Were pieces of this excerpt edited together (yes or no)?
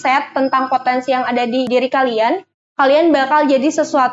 yes